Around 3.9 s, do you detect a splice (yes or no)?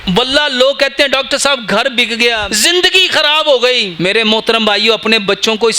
yes